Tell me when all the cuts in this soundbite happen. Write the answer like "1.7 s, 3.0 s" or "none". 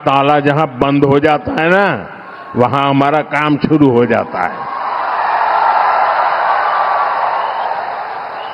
none